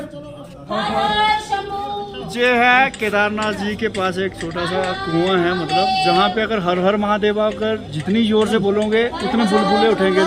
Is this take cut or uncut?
uncut